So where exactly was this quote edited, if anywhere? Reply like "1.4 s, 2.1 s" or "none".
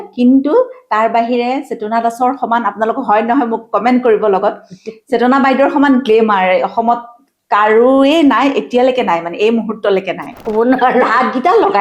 10.4 s